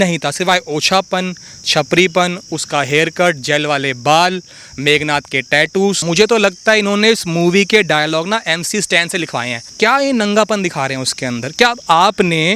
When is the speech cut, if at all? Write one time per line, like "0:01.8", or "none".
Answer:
0:06.0
0:09.7